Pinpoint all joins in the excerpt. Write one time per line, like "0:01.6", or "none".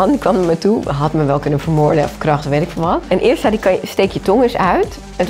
none